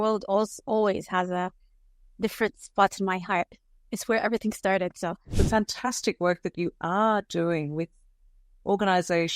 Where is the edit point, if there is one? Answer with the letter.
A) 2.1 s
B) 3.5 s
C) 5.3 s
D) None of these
C